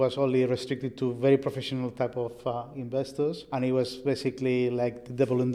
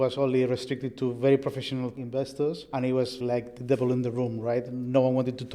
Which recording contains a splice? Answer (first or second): second